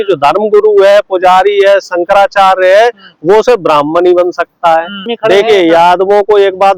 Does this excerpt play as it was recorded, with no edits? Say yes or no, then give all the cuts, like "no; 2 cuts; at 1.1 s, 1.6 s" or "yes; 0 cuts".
no; 1 cut; at 5.1 s